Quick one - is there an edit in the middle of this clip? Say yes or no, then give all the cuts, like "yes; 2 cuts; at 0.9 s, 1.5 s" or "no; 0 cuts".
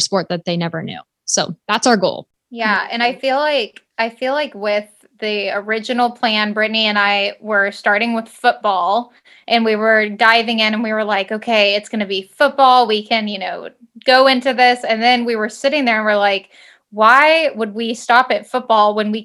no; 0 cuts